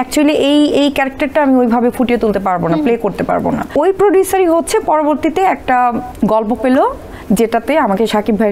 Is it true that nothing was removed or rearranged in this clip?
no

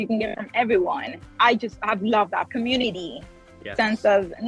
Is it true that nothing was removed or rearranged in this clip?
no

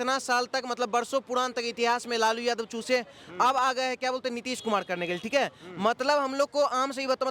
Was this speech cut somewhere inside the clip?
no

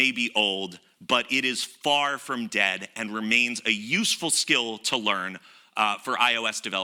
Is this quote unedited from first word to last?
yes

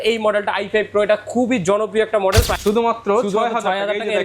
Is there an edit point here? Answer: yes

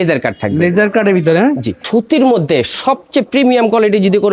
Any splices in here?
yes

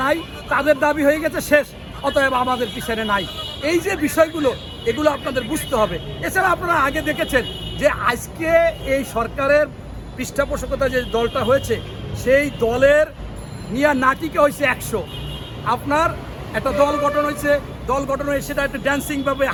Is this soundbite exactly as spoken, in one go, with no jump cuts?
yes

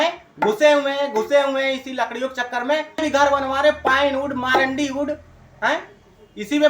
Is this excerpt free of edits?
no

